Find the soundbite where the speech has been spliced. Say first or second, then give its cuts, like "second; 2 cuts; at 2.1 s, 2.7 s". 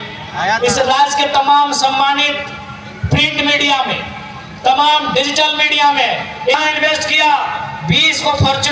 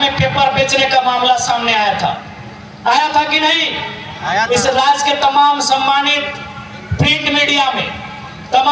first; 1 cut; at 6.5 s